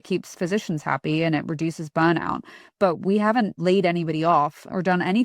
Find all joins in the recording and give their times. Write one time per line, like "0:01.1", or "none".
0:03.6